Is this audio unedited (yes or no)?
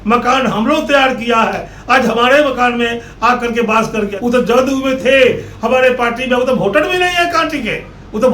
no